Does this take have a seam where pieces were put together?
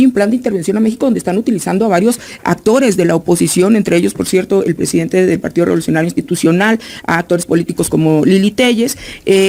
no; 0 cuts

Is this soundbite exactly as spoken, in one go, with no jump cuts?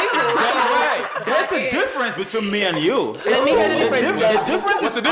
yes; 0 cuts

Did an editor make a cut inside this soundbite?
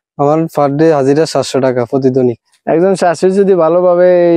yes; 1 cut; at 2.5 s

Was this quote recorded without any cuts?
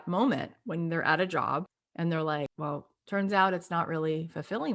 no; 2 cuts; at 1.8 s, 2.5 s

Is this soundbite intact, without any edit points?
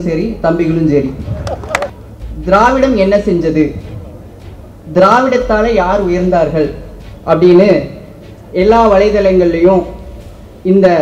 no; 1 cut; at 1.9 s

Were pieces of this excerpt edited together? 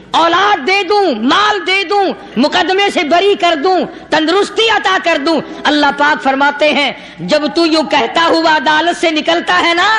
no; 0 cuts

